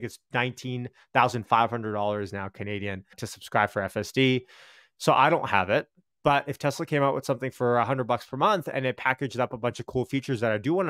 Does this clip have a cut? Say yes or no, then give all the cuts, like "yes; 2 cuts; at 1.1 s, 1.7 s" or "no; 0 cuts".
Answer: yes; 1 cut; at 3.3 s